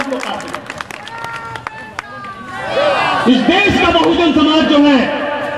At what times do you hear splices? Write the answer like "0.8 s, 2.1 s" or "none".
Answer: none